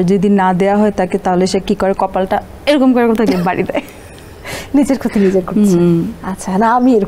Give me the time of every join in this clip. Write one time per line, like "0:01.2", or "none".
none